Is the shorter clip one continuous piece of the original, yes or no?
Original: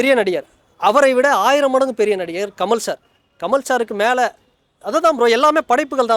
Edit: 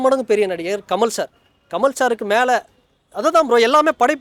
yes